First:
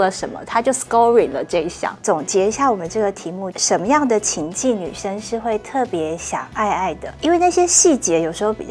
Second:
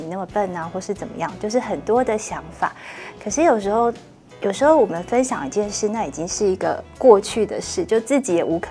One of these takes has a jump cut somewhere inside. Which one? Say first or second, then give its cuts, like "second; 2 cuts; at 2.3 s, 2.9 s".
first; 3 cuts; at 2.0 s, 3.5 s, 7.1 s